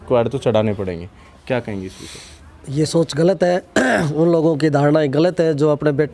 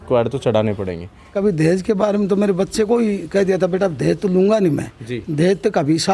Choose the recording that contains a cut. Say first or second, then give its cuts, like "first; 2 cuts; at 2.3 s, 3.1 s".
second; 1 cut; at 1.3 s